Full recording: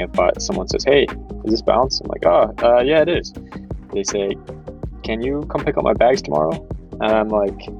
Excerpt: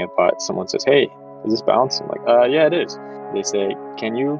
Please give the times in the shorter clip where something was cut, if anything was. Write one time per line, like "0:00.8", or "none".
0:02.2
0:03.4